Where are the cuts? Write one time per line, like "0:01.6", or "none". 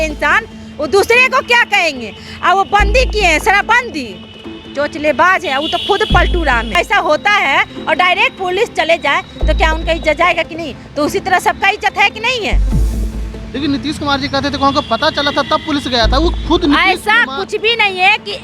0:06.8
0:16.4